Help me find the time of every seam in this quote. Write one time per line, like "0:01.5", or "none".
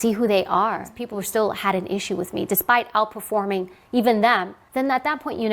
0:00.9
0:04.6